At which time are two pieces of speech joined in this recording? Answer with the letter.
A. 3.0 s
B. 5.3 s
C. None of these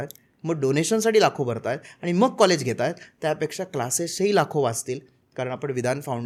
C